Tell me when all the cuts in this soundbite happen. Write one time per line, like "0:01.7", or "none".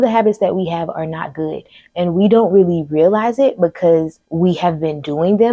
0:04.2